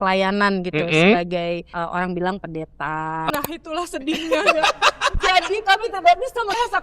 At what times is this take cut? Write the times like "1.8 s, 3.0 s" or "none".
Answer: 1.7 s, 3.3 s